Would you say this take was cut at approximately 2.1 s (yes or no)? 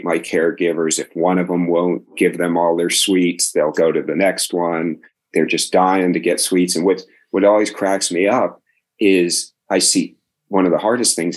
yes